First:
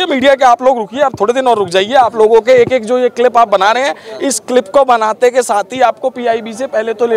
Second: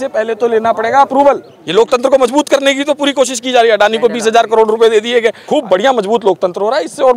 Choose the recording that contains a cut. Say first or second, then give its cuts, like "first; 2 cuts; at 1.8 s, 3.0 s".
second; 2 cuts; at 1.5 s, 5.4 s